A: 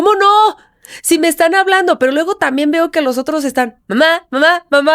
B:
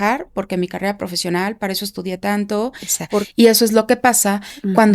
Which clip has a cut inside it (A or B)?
B